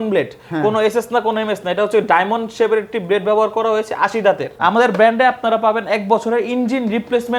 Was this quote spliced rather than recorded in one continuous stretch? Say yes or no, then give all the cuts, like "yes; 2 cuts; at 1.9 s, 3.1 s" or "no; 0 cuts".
yes; 1 cut; at 4.5 s